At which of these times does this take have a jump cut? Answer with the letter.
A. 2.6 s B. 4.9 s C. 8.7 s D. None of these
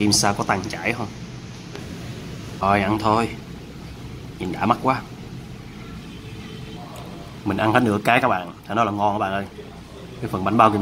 A